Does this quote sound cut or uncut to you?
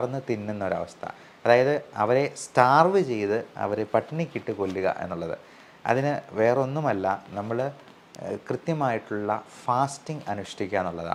uncut